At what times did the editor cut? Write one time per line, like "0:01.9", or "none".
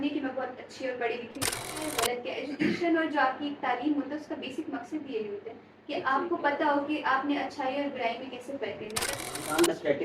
0:01.8
0:09.2